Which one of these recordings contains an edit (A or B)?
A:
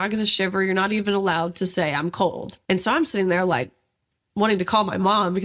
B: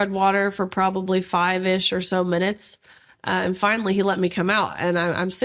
A